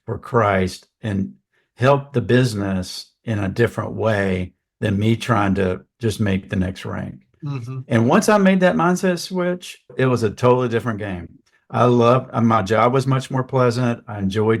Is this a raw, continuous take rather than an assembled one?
no; 1 cut; at 9.9 s

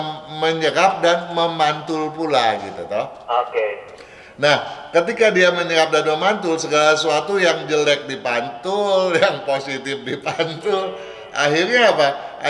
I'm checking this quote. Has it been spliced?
no; 0 cuts

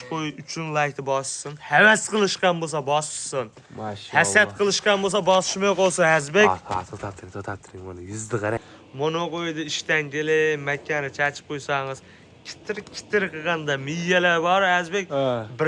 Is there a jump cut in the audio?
yes; 1 cut; at 8.7 s

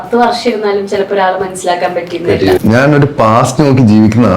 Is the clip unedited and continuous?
no; 1 cut; at 2.6 s

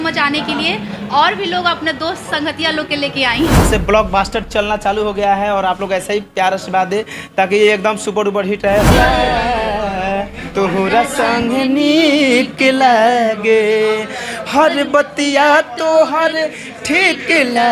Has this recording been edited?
yes; 2 cuts; at 3.6 s, 8.9 s

